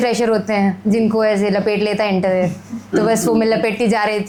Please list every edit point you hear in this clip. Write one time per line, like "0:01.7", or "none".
none